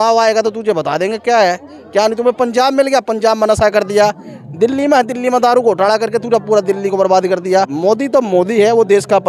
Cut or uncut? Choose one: cut